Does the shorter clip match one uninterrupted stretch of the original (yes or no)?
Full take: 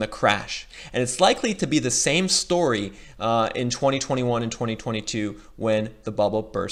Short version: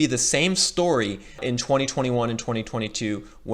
no